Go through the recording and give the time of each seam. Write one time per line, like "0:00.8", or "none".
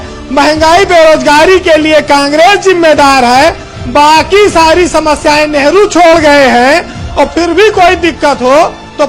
none

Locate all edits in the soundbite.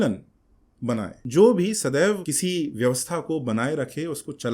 0:01.2
0:02.3

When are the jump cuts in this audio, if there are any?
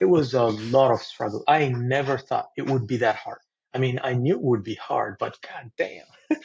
none

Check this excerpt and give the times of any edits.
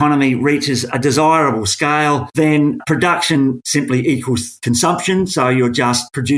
none

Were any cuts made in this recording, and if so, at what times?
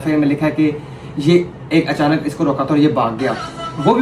none

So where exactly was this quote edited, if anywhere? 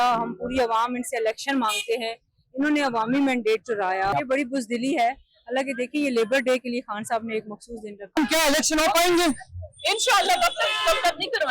0:04.1
0:08.2

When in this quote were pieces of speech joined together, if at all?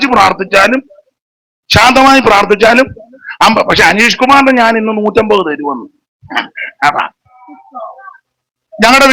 0:07.6

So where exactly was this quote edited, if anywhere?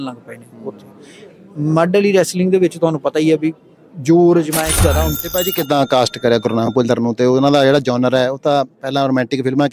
0:05.2

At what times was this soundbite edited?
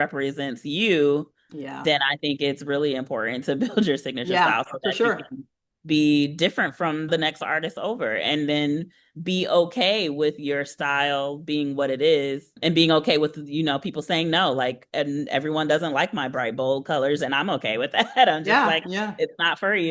0:07.1
0:12.5

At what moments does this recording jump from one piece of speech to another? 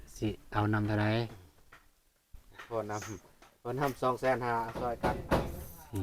0:05.0

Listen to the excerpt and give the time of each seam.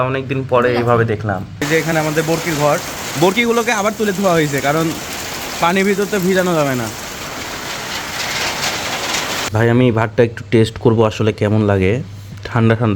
0:01.5
0:09.5

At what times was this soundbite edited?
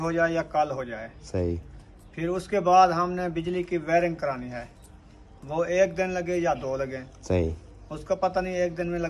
none

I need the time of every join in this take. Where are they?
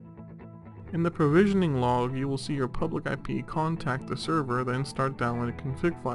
0:00.9

